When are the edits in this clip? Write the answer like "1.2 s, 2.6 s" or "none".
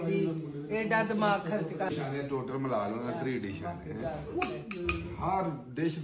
1.9 s